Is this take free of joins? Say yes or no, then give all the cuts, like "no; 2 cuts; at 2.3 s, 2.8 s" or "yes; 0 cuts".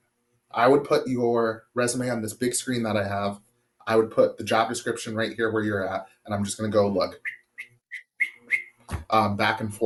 yes; 0 cuts